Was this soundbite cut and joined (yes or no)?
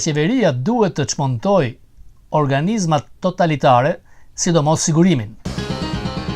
yes